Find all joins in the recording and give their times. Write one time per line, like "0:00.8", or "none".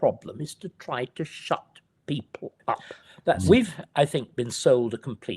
0:03.4